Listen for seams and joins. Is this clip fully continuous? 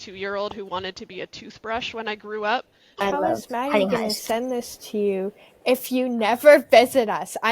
no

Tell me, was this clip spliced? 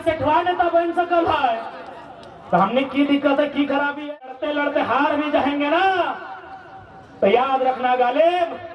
yes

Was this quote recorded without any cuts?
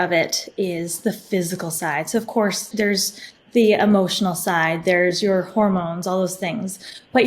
no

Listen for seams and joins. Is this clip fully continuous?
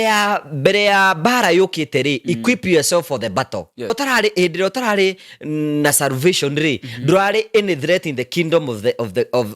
no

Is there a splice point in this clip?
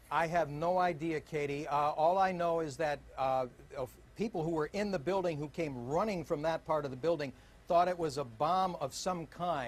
yes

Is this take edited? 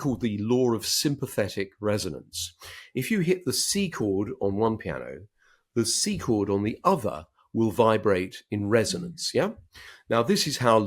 no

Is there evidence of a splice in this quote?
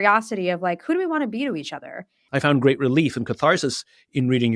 yes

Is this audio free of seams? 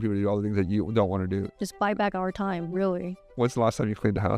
no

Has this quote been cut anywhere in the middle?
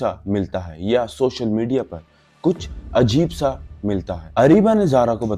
yes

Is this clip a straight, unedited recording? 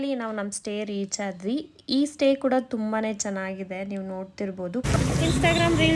no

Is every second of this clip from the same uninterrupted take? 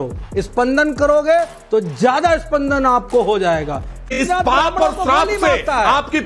no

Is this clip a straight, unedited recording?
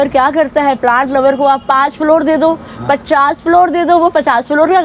yes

